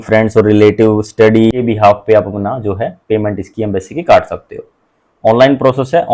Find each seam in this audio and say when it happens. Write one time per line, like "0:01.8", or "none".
0:01.5